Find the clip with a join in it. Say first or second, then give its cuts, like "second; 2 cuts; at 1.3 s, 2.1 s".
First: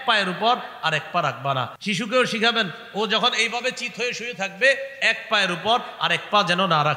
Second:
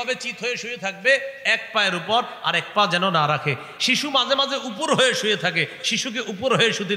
first; 1 cut; at 1.7 s